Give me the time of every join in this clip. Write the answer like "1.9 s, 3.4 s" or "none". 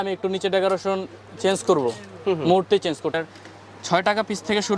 3.1 s